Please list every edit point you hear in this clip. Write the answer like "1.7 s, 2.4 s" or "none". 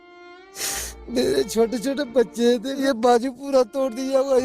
2.8 s